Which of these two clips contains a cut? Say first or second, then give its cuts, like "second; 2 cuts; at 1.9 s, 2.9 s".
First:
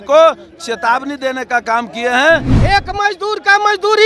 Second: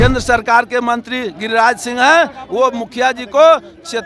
first; 1 cut; at 2.5 s